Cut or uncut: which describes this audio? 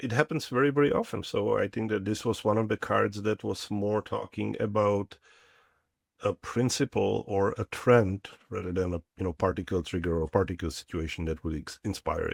uncut